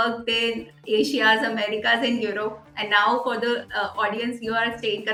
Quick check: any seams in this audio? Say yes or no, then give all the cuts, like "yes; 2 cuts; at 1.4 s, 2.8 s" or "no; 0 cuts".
no; 0 cuts